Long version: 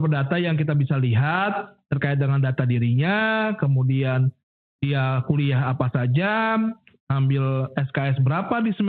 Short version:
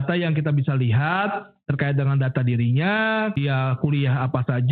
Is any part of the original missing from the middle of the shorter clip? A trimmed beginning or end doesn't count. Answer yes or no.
yes